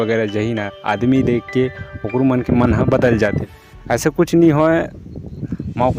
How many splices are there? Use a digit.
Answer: 1